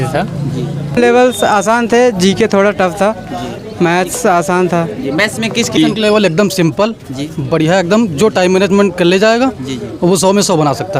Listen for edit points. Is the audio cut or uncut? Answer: cut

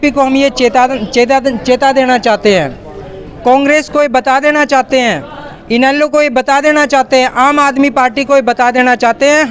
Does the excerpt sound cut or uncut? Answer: uncut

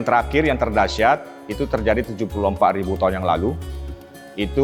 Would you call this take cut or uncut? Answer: uncut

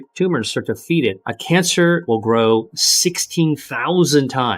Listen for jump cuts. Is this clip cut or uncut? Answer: cut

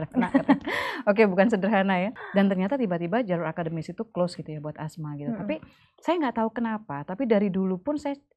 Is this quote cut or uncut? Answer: cut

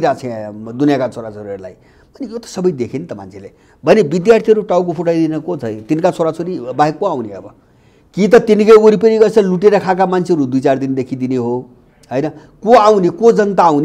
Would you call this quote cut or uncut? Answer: uncut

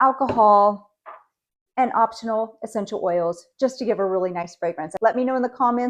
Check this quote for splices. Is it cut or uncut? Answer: cut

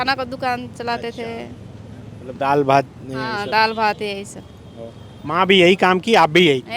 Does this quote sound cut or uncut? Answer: uncut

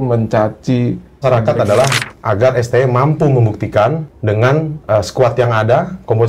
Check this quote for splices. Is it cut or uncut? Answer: cut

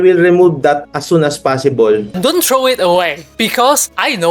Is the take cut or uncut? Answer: cut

